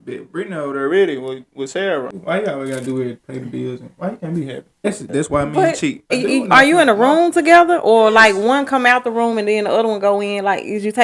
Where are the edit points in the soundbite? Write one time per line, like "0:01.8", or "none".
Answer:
0:02.1
0:04.8
0:06.1

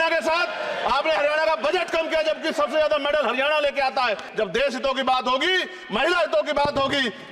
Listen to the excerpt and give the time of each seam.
0:04.2

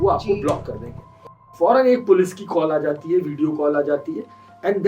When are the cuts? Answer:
0:01.5

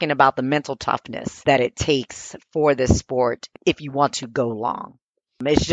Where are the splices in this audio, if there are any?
0:01.4

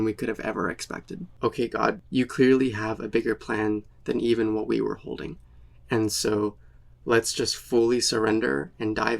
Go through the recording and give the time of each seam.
0:01.2

